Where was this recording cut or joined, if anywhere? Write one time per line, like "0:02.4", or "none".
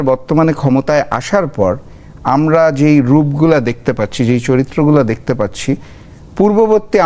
none